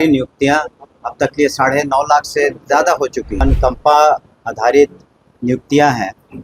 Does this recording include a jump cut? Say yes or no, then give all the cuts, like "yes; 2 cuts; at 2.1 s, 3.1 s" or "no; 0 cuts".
yes; 1 cut; at 3.4 s